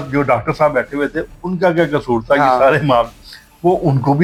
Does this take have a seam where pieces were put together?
no; 0 cuts

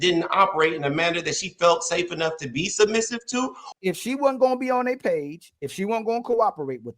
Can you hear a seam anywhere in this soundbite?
yes; 1 cut; at 3.6 s

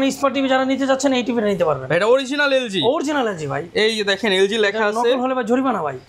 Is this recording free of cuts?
yes; 0 cuts

